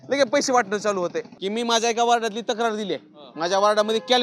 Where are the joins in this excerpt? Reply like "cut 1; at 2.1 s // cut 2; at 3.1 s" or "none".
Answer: cut 1; at 1.3 s